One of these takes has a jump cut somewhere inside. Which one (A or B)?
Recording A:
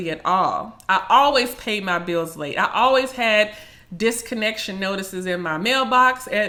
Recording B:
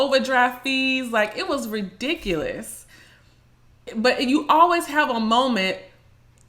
B